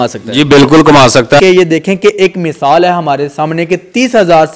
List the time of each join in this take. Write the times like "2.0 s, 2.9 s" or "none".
1.4 s